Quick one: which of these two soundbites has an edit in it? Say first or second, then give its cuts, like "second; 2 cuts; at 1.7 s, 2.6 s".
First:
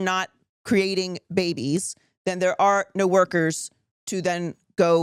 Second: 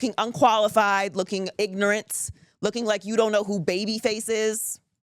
second; 1 cut; at 1.5 s